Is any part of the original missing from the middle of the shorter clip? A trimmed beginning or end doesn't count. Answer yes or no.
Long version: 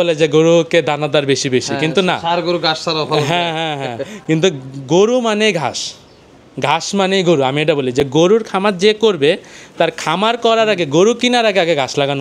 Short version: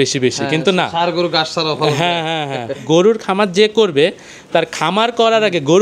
yes